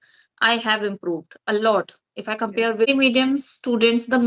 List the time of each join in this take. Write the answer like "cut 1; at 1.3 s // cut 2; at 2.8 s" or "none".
cut 1; at 2.9 s